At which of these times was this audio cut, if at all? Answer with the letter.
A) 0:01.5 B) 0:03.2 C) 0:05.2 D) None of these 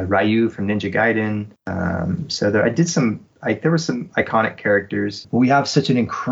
C